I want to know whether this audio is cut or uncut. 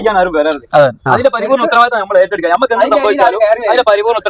uncut